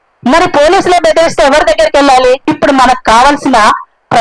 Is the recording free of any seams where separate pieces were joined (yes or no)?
no